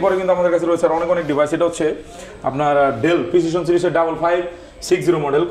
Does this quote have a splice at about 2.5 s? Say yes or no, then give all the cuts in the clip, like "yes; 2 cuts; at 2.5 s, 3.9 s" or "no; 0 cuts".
no; 0 cuts